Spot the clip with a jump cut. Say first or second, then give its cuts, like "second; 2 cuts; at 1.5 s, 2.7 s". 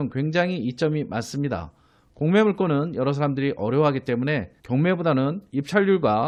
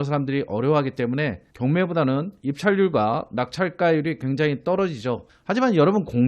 second; 1 cut; at 5.3 s